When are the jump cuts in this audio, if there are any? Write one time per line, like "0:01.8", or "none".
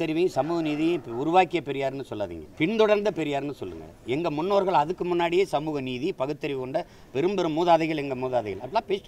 0:02.4